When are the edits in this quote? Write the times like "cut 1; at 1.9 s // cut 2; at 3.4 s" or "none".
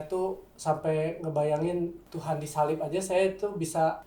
cut 1; at 2.1 s

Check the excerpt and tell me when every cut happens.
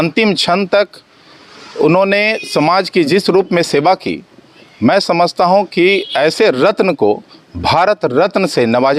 none

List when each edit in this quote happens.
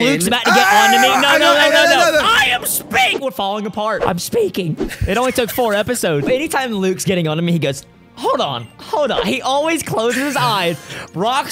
cut 1; at 4.0 s // cut 2; at 6.3 s

